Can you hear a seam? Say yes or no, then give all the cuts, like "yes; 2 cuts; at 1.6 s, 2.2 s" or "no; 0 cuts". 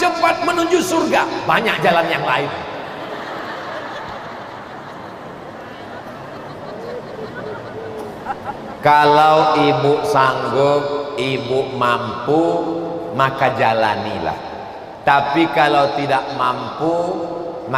no; 0 cuts